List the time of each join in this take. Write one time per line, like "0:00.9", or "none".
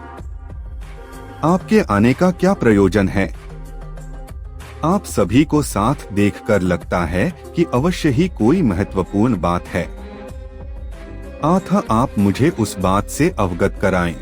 0:09.9
0:11.3